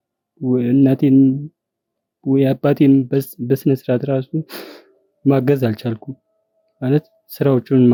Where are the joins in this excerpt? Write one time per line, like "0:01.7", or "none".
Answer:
none